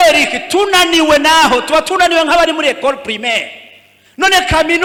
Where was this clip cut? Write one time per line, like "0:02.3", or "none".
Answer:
none